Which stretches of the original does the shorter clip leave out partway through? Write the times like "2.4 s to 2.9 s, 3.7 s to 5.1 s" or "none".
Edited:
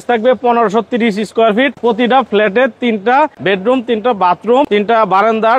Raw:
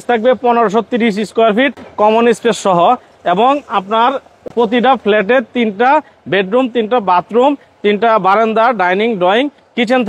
1.8 s to 4.5 s, 6.1 s to 6.2 s, 7.5 s to 7.8 s